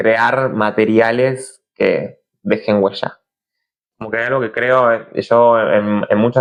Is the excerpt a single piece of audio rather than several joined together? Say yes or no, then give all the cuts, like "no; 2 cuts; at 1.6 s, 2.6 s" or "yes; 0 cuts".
yes; 0 cuts